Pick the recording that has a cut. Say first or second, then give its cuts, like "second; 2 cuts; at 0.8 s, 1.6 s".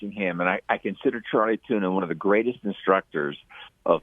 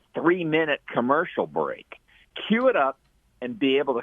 second; 1 cut; at 2.3 s